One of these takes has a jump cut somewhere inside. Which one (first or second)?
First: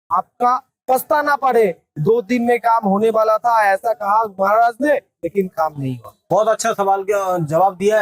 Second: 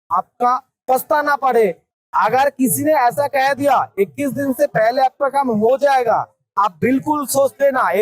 second